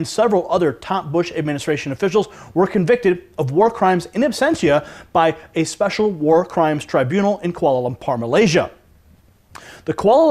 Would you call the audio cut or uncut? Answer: cut